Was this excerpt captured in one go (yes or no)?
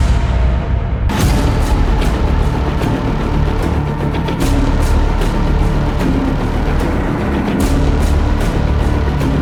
yes